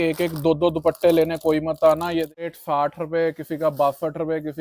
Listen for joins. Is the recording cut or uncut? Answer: cut